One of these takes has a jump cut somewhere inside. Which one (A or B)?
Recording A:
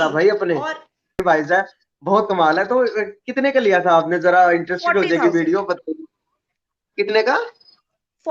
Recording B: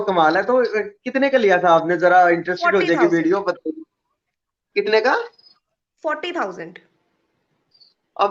A